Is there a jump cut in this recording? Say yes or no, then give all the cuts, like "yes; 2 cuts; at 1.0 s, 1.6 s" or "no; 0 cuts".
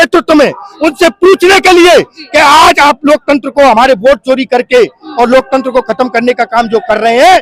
no; 0 cuts